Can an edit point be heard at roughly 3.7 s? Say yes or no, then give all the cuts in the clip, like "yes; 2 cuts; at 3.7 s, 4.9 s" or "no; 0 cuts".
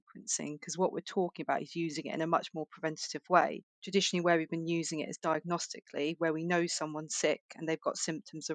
yes; 1 cut; at 3.7 s